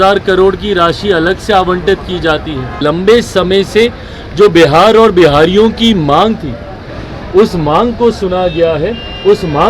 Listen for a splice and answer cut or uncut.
cut